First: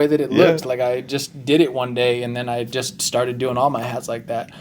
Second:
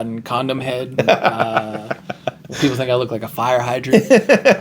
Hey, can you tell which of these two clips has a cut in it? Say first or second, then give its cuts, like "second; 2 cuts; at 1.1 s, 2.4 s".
second; 3 cuts; at 0.9 s, 2.5 s, 3.9 s